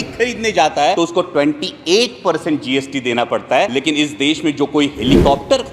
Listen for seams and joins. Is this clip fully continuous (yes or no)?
no